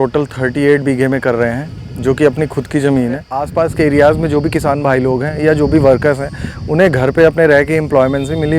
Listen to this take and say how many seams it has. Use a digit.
1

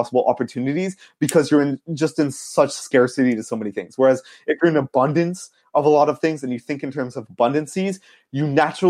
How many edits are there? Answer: 0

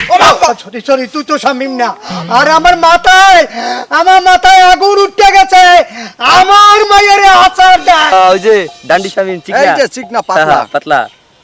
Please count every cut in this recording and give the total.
1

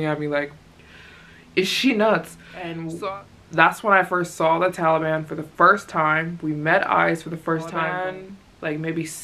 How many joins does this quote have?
2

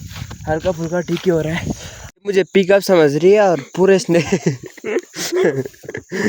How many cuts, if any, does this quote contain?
1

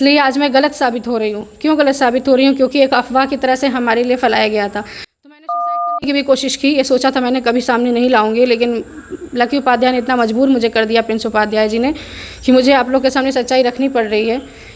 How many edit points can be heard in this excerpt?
0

